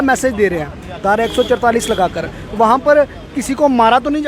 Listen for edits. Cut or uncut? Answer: uncut